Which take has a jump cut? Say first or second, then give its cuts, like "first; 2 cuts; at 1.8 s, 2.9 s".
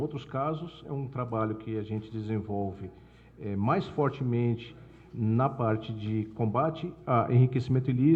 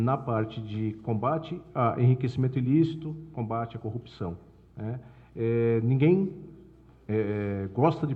first; 1 cut; at 2.1 s